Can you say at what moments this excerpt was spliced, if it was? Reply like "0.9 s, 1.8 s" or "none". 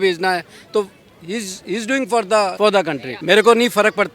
2.9 s